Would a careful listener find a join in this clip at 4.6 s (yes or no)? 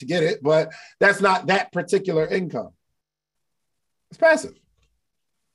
no